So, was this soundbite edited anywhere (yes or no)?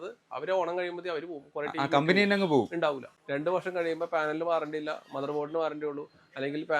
yes